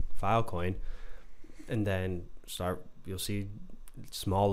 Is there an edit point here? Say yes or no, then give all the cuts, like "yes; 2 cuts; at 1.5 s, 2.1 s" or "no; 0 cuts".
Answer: no; 0 cuts